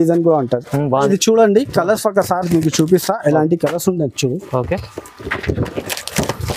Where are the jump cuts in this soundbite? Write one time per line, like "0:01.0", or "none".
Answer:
0:00.9